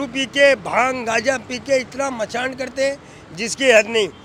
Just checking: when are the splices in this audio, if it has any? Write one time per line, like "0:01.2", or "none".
none